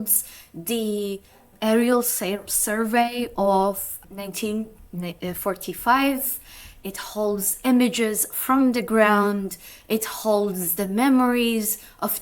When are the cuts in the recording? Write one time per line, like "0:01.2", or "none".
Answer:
0:01.5
0:03.9